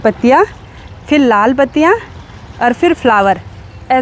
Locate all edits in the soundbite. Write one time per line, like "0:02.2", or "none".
none